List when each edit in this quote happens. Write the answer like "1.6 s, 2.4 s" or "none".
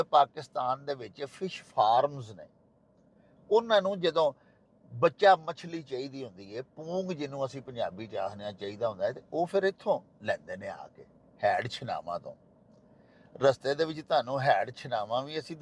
none